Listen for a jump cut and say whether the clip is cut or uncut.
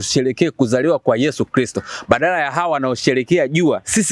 uncut